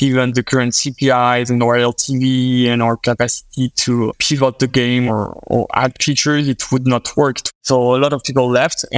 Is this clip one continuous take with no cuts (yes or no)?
no